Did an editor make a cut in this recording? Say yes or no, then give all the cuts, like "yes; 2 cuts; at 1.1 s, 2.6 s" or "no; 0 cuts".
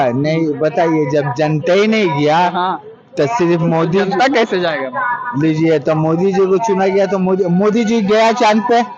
no; 0 cuts